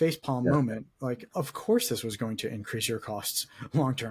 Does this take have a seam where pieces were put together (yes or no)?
yes